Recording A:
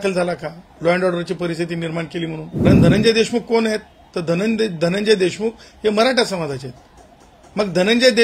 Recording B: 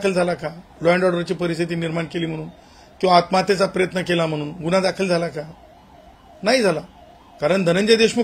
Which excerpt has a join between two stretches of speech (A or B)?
A